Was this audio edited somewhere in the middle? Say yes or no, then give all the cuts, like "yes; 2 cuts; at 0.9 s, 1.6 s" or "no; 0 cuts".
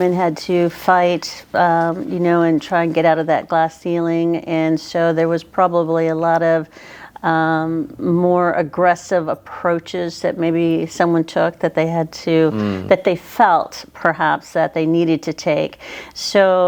no; 0 cuts